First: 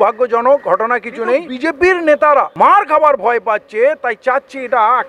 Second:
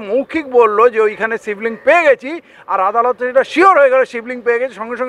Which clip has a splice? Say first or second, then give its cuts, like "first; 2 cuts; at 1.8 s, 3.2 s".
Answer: first; 2 cuts; at 1.5 s, 2.5 s